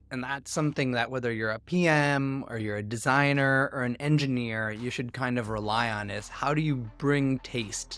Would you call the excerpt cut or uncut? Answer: uncut